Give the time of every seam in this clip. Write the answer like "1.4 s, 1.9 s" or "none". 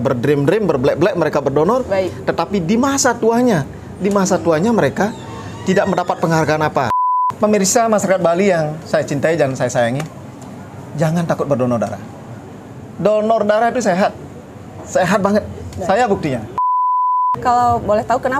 7.0 s, 17.0 s